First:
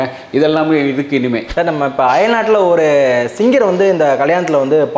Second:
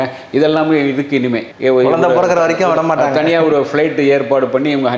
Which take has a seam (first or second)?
first